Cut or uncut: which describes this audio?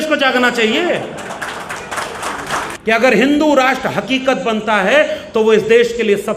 cut